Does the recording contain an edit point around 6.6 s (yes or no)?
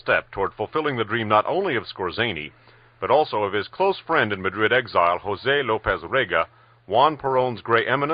yes